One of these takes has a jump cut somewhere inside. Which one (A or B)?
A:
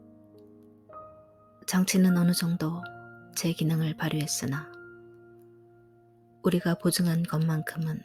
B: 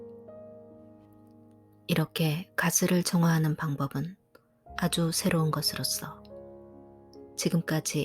B